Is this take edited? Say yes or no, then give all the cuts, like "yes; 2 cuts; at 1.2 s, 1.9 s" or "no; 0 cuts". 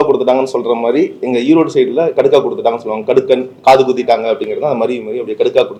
no; 0 cuts